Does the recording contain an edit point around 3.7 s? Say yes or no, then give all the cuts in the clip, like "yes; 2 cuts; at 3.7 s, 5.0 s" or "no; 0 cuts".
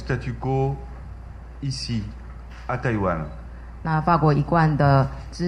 no; 0 cuts